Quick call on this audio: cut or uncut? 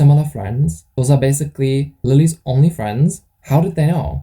cut